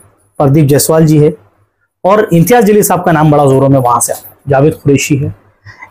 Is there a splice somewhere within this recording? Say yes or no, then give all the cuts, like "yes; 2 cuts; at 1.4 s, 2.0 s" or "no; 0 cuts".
no; 0 cuts